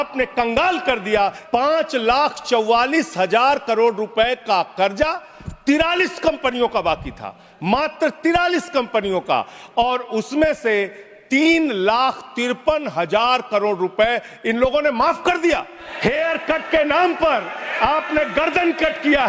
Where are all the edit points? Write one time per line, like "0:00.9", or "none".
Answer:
0:01.4
0:15.8